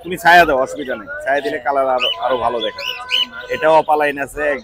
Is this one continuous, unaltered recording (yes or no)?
yes